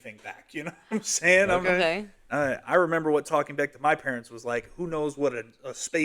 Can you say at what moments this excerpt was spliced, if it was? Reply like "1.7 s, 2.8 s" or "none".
none